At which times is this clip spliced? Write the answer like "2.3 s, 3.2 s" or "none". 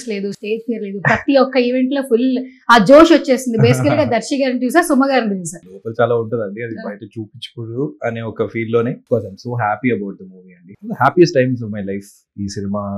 5.8 s, 9.0 s, 10.7 s